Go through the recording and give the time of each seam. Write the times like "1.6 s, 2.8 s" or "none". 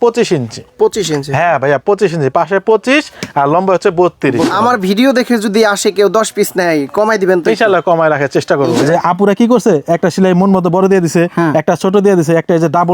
4.5 s, 8.7 s